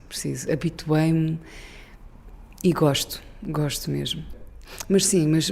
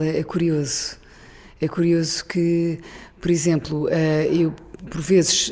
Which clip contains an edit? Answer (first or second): first